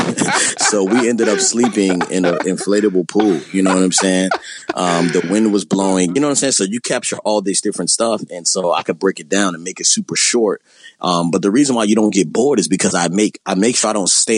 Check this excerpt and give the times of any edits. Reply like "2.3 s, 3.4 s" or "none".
none